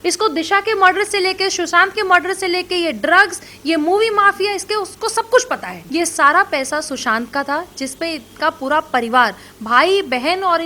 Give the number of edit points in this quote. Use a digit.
1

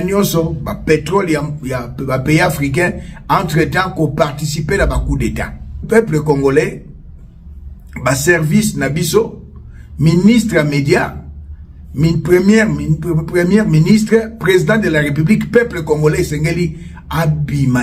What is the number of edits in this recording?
1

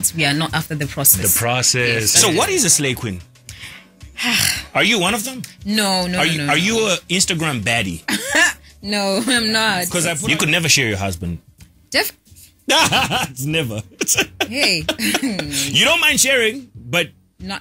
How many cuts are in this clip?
2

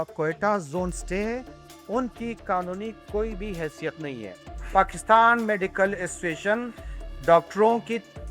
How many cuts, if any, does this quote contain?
1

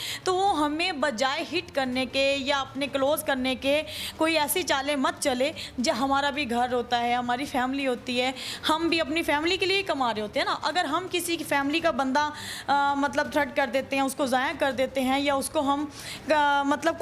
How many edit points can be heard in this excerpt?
0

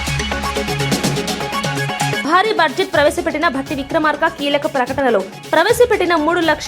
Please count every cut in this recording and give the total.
1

